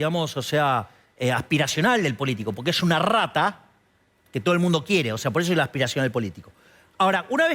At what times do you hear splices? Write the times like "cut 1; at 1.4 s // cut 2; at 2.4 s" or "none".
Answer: none